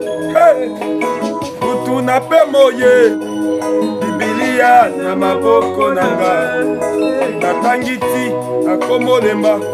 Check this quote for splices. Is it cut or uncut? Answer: uncut